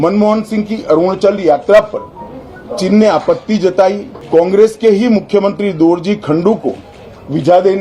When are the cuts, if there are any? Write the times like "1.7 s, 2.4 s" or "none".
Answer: 4.1 s